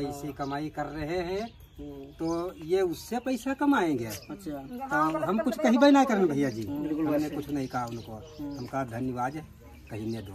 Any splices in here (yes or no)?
no